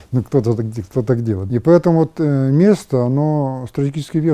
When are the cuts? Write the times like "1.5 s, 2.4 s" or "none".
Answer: 1.4 s